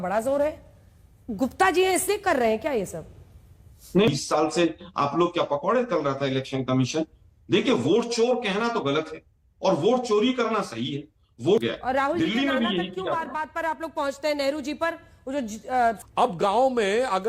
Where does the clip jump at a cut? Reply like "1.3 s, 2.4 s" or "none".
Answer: 4.1 s, 11.6 s, 16.0 s